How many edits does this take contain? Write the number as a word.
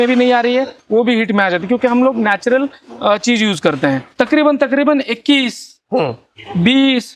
one